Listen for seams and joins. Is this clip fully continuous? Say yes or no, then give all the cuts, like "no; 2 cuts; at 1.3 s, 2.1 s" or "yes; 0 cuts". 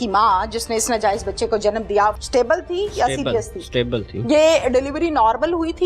no; 1 cut; at 2.2 s